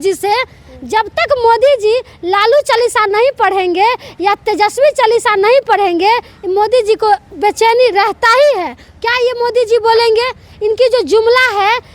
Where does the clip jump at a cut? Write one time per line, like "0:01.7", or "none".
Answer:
none